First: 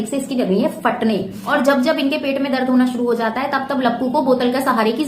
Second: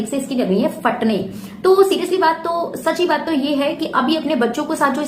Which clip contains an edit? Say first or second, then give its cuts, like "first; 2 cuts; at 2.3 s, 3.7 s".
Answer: first; 1 cut; at 1.4 s